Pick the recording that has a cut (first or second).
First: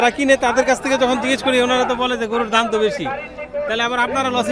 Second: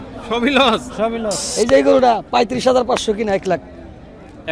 second